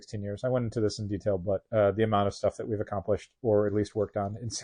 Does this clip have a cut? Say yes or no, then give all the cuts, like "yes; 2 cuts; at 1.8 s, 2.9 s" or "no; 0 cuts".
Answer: no; 0 cuts